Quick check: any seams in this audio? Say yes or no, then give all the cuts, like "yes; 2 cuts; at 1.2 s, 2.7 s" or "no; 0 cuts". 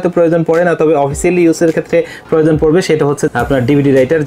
yes; 1 cut; at 3.2 s